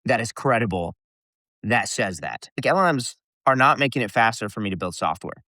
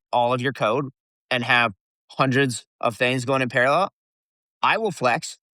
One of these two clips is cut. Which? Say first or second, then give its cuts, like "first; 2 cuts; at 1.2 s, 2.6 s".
first; 1 cut; at 2.6 s